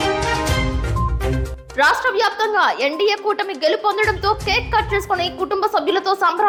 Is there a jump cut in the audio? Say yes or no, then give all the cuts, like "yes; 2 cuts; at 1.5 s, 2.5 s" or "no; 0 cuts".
no; 0 cuts